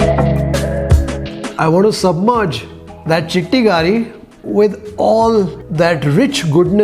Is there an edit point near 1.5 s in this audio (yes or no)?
yes